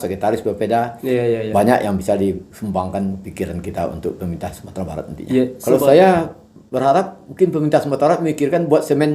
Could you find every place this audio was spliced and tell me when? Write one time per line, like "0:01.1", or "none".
0:05.6